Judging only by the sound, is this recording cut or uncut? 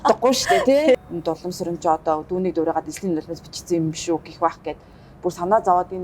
cut